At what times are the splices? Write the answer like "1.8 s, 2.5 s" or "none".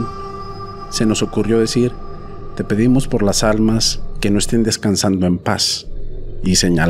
none